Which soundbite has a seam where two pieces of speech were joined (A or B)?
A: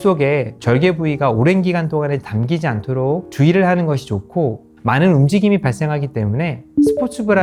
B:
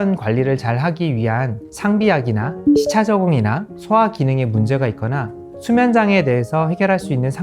B